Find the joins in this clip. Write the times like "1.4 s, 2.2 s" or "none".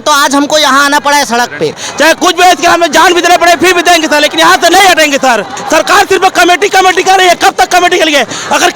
1.9 s, 5.6 s